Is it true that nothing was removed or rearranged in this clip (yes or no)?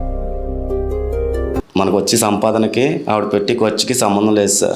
no